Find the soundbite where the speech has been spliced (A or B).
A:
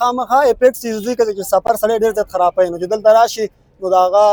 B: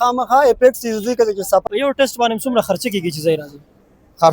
B